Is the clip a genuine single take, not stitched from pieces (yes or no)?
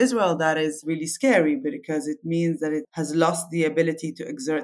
yes